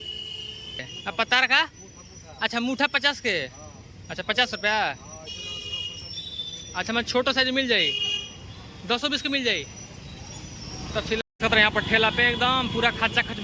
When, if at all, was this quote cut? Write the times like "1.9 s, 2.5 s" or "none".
0.9 s, 11.2 s

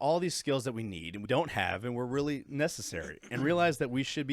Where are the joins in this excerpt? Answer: 1.2 s

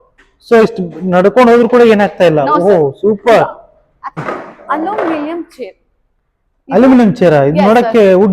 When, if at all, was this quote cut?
4.2 s

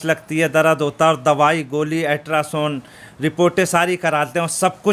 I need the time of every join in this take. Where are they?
none

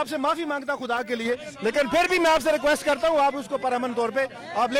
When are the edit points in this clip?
none

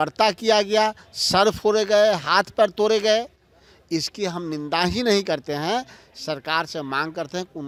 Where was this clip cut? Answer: none

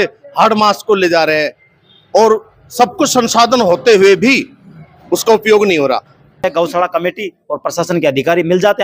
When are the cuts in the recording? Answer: 6.4 s

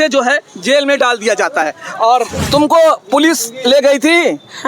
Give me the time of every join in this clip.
2.1 s

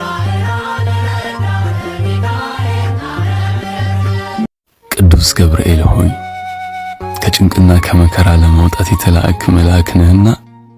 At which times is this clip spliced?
4.5 s

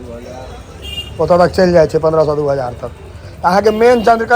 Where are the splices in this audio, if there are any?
none

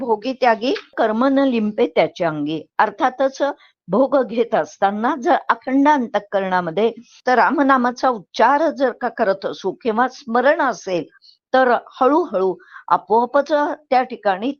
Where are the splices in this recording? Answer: 0.9 s, 7.1 s

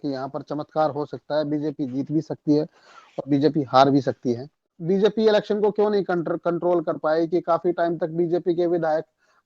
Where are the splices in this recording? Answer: 4.8 s

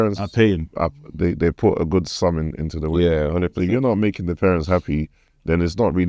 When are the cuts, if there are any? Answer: none

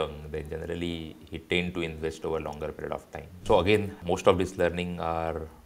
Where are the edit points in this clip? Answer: 3.4 s, 4.0 s

